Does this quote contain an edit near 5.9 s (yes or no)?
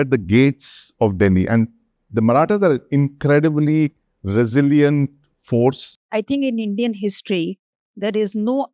yes